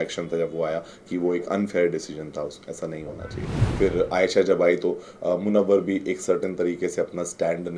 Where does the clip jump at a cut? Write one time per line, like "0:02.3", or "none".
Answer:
0:03.6